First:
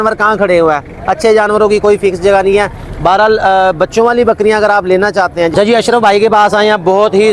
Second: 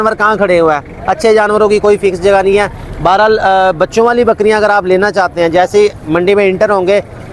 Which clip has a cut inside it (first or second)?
first